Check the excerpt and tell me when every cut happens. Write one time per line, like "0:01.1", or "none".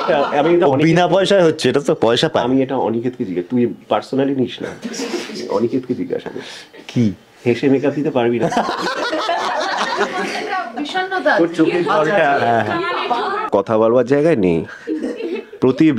0:13.5